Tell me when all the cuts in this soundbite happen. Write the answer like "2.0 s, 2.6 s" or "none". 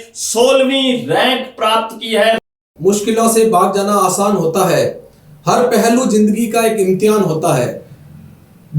2.6 s